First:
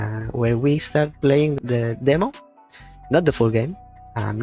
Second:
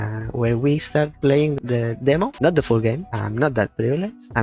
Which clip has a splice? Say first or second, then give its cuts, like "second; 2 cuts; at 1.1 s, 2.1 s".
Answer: second; 2 cuts; at 2.3 s, 3.1 s